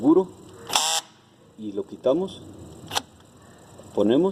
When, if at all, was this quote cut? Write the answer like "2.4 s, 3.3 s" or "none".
none